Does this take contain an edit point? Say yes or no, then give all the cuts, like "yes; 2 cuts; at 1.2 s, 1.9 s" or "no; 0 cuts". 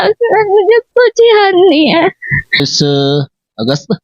yes; 1 cut; at 2.6 s